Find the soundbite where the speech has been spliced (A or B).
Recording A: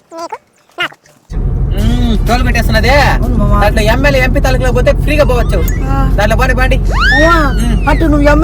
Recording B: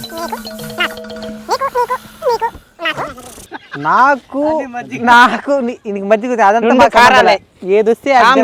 A